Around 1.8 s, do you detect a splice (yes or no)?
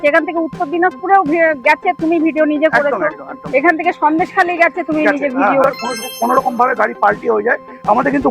no